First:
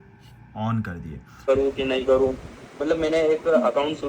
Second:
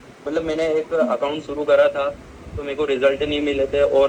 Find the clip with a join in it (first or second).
first